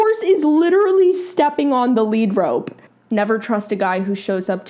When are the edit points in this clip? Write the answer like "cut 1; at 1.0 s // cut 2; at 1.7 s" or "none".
cut 1; at 2.8 s